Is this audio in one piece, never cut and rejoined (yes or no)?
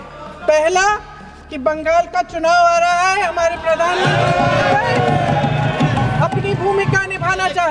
yes